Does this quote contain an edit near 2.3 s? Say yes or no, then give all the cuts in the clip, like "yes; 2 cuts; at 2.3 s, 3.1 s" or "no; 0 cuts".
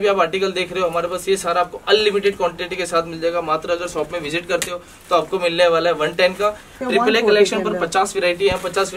no; 1 cut; at 6.7 s